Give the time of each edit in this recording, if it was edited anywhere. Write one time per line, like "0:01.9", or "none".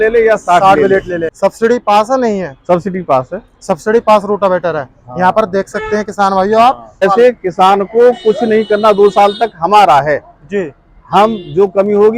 0:01.3
0:07.0